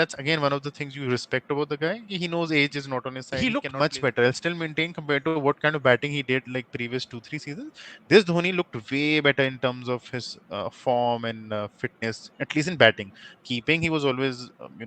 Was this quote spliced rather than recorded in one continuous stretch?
yes; 1 cut; at 3.2 s

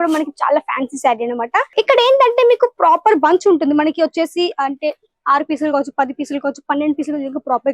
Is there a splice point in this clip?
yes; 1 cut; at 1.7 s

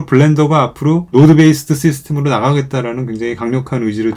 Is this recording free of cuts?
no; 1 cut; at 1.0 s

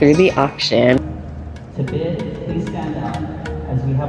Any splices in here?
yes; 1 cut; at 1.0 s

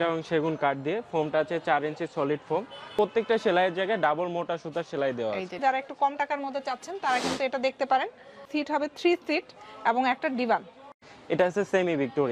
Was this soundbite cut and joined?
yes; 4 cuts; at 2.9 s, 5.6 s, 8.5 s, 11.1 s

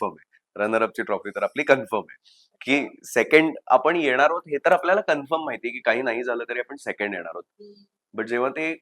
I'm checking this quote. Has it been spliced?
no; 0 cuts

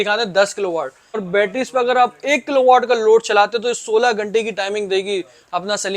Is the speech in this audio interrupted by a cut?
yes; 1 cut; at 1.2 s

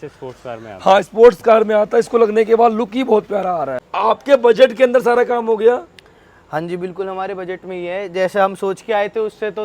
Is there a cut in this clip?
yes; 1 cut; at 3.9 s

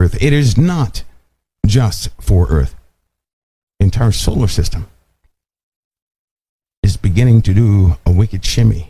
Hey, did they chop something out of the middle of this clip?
no; 0 cuts

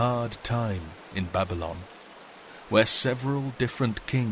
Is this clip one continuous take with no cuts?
yes; 0 cuts

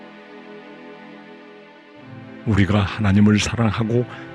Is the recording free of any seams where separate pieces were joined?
no; 1 cut; at 2.4 s

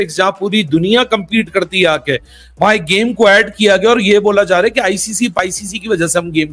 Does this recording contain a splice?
no; 0 cuts

